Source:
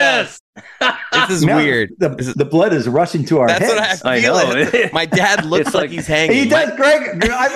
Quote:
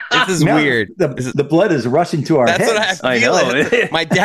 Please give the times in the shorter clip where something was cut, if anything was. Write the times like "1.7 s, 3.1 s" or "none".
none